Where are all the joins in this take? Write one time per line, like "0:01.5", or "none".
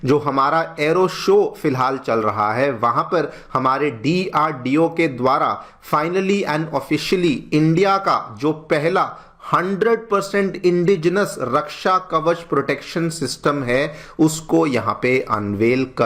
none